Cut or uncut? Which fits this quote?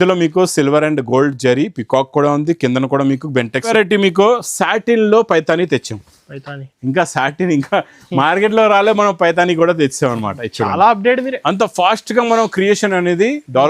cut